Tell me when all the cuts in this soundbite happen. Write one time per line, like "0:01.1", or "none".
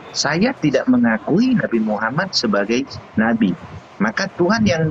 none